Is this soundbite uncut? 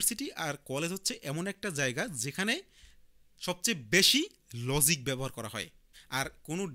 yes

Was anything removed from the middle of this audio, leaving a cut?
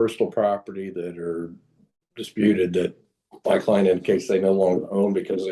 no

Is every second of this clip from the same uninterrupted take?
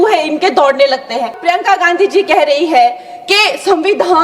no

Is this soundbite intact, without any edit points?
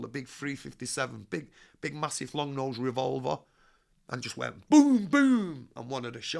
yes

